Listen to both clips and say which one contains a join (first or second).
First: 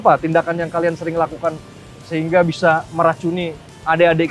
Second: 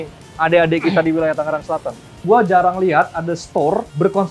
second